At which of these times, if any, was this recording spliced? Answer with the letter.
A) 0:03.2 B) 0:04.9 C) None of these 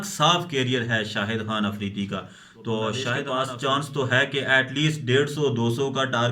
A